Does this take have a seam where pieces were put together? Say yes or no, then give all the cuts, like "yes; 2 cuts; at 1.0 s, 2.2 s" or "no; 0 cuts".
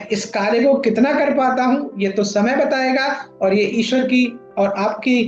no; 0 cuts